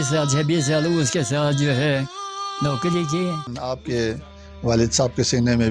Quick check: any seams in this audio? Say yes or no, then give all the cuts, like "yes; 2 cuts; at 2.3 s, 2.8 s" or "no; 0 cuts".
yes; 1 cut; at 3.5 s